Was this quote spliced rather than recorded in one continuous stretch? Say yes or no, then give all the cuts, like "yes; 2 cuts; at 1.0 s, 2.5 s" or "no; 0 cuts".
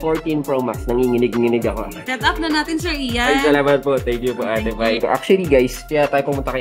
yes; 2 cuts; at 2.0 s, 5.0 s